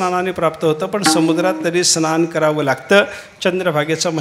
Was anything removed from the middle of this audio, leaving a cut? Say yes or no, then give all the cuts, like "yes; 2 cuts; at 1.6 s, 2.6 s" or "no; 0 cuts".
no; 0 cuts